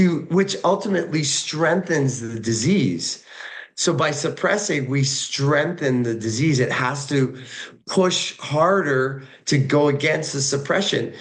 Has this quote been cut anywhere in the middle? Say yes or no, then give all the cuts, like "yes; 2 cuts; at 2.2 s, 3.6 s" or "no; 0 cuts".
no; 0 cuts